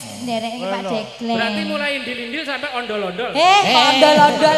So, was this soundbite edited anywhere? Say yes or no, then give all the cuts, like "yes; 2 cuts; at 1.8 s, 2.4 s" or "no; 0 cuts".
no; 0 cuts